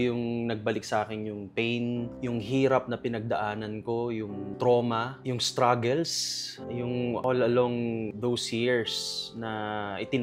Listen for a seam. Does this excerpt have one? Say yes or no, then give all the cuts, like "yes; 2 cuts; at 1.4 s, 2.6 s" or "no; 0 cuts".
no; 0 cuts